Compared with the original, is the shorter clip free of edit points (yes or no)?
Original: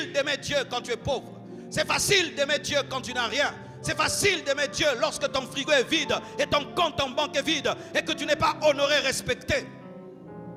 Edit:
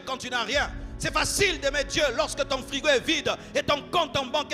yes